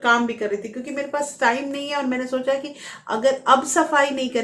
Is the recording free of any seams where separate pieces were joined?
yes; 0 cuts

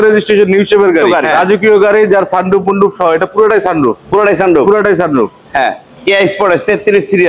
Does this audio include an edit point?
yes; 1 cut; at 1.0 s

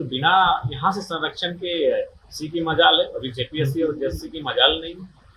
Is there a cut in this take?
no; 0 cuts

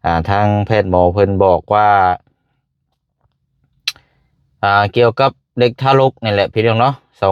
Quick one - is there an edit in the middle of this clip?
no; 0 cuts

